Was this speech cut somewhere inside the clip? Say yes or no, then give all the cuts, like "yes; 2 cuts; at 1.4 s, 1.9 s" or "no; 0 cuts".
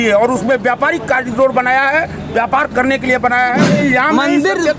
yes; 1 cut; at 3.7 s